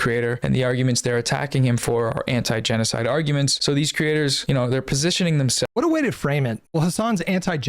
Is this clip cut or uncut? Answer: cut